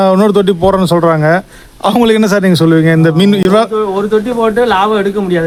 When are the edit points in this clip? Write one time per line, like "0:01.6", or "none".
none